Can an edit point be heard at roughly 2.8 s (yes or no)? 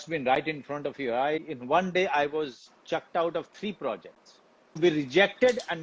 no